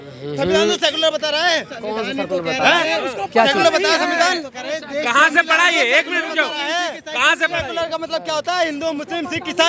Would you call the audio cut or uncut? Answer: uncut